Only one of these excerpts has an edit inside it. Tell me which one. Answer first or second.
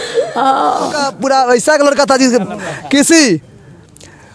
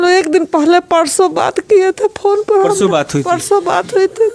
first